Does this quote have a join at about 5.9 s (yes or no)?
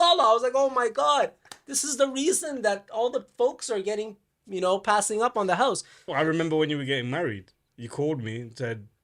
yes